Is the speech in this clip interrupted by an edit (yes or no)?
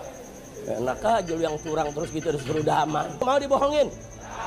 yes